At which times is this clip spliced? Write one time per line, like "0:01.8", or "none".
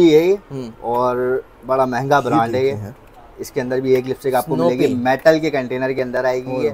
none